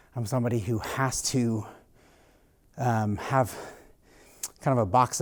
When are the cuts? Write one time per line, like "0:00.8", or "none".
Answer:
none